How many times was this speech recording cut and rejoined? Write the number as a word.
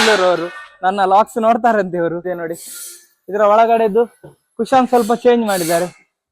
one